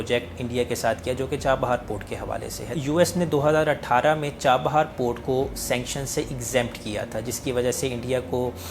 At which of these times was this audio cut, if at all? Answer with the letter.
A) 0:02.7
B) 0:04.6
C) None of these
A